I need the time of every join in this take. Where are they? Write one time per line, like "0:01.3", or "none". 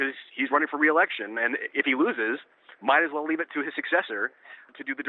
none